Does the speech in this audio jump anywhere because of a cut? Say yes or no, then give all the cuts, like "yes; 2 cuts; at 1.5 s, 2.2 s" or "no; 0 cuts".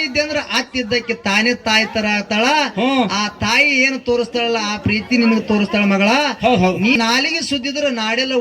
yes; 1 cut; at 7.0 s